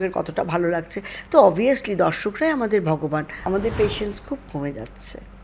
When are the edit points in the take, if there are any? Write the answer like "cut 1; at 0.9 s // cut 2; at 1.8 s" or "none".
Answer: cut 1; at 3.5 s

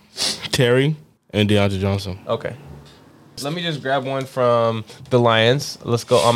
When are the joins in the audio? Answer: cut 1; at 1.1 s // cut 2; at 3.4 s

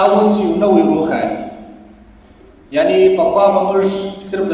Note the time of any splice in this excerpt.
none

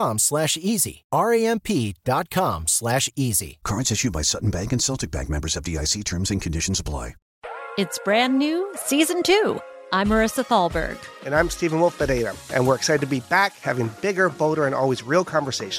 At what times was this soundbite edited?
cut 1; at 7.3 s

